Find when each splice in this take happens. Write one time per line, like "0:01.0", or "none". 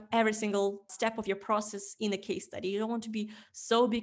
0:00.9